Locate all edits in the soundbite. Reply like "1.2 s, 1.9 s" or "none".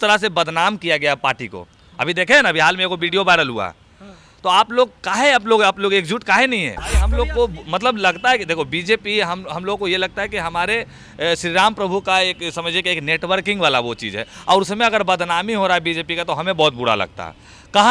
7.1 s